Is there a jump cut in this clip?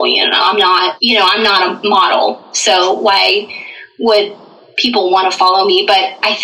yes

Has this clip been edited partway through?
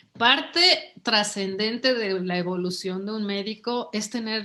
no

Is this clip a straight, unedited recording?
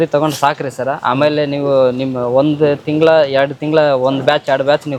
yes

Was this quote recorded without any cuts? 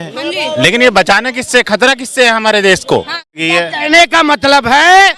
no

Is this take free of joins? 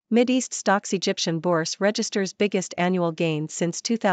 yes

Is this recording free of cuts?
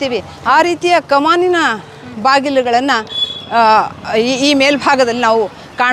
yes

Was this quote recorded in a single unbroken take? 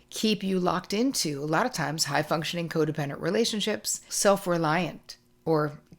no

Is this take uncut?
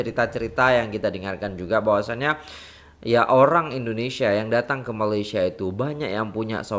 yes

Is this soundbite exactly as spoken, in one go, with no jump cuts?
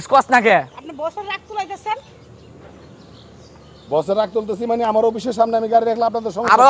yes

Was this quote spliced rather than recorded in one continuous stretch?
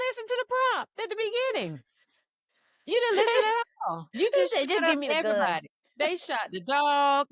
no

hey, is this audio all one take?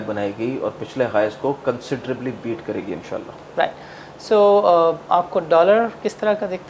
yes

